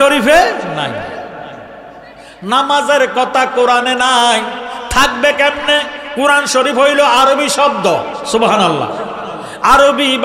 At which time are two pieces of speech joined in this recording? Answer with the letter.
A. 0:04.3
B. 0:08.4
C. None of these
C